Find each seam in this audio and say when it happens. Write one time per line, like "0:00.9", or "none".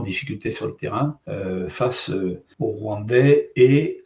0:01.2
0:02.5